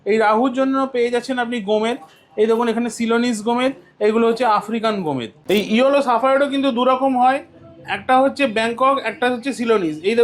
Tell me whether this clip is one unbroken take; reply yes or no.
no